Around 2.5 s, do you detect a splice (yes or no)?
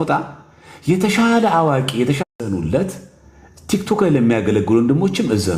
yes